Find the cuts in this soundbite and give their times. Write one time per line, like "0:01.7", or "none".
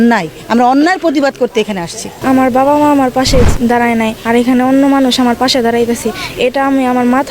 0:02.1